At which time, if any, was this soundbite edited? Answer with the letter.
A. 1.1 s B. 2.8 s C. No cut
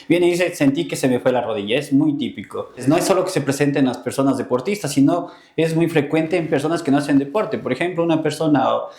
B